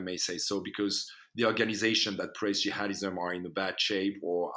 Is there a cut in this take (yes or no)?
no